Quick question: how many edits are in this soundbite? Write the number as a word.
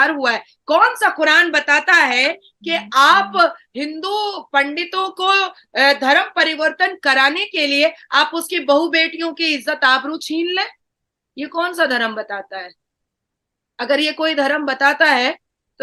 zero